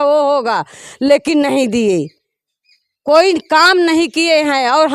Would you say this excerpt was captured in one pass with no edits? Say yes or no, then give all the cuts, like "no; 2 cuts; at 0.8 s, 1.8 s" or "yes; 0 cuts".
yes; 0 cuts